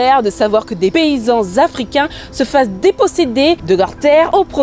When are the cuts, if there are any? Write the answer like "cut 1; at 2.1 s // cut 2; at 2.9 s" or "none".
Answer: cut 1; at 0.9 s